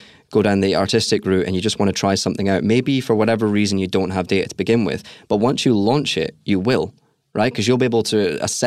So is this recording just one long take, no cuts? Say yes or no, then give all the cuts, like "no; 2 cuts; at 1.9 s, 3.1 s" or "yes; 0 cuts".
yes; 0 cuts